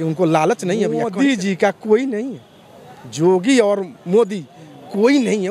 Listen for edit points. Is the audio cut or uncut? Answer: cut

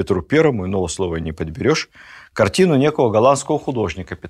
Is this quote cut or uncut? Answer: uncut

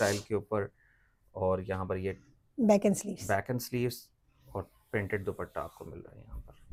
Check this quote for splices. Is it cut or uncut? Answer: uncut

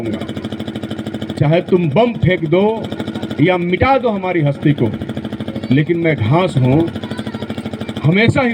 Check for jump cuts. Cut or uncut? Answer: uncut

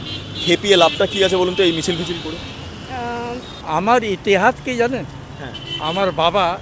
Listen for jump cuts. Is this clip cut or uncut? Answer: cut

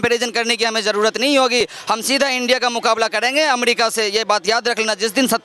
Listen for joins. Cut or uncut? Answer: uncut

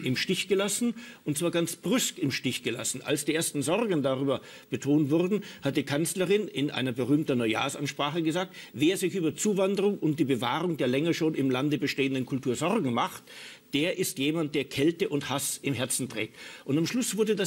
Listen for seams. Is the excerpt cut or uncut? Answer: uncut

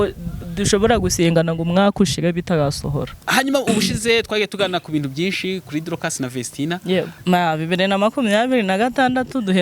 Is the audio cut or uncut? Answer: cut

